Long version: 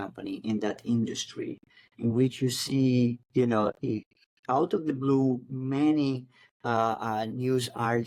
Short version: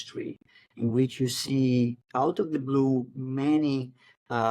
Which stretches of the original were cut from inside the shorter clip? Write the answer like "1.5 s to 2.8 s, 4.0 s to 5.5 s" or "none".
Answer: 3.2 s to 4.3 s